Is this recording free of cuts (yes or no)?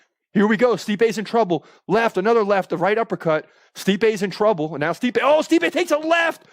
yes